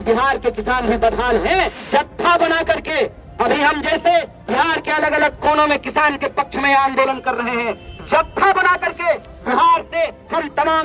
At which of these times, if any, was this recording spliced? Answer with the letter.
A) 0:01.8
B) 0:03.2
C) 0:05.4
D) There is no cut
A